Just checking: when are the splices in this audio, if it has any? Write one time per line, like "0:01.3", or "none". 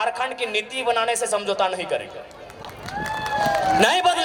none